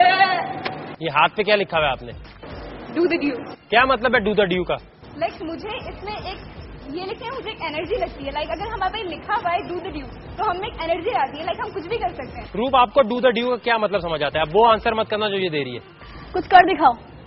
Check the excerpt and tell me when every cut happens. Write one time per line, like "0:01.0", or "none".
0:03.9

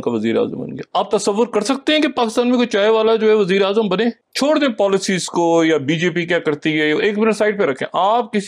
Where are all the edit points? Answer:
0:04.3

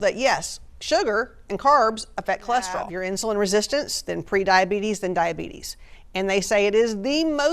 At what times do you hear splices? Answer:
0:03.0

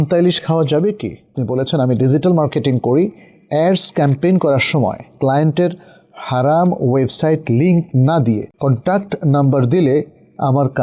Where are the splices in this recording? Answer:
0:01.4
0:08.5

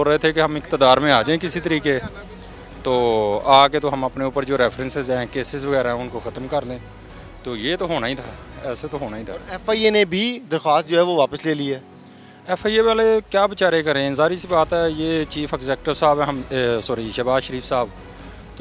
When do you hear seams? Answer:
none

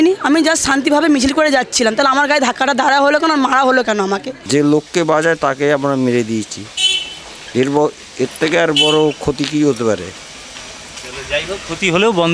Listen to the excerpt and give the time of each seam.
0:04.3

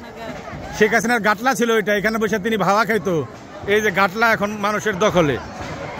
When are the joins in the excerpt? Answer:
none

